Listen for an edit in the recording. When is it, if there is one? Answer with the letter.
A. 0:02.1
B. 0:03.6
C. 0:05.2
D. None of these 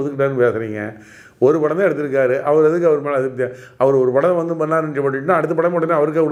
D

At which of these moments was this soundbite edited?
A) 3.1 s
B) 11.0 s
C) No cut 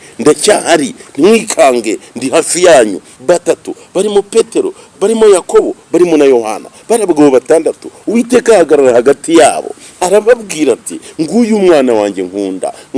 A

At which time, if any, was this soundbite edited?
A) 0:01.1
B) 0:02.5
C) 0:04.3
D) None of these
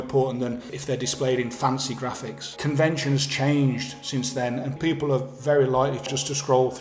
B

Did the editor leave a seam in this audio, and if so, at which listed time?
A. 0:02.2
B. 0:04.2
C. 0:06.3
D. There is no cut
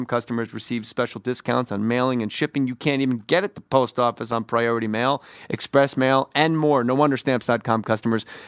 B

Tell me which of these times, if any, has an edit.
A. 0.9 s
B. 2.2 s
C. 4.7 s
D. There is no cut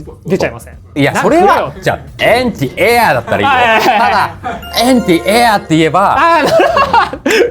A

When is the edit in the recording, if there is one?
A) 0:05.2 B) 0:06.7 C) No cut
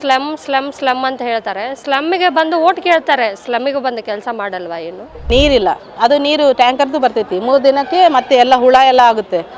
A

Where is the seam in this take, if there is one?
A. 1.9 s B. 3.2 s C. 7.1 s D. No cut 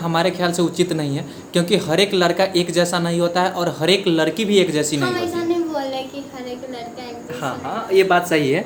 D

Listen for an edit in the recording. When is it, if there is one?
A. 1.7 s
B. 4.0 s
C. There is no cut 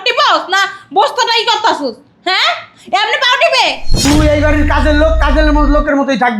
B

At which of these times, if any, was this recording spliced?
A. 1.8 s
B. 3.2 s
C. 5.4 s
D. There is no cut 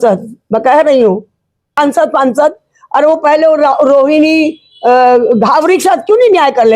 A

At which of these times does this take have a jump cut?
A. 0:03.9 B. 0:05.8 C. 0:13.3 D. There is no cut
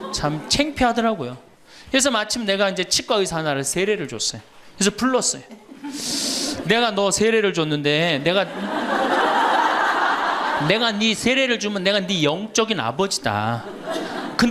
D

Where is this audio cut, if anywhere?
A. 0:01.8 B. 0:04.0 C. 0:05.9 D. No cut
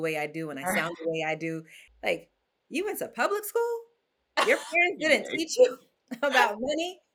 A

